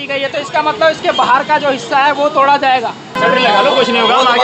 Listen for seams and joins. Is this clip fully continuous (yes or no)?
no